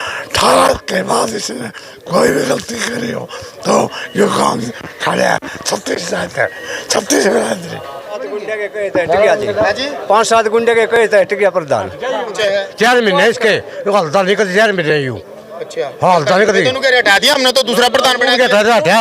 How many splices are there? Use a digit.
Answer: 2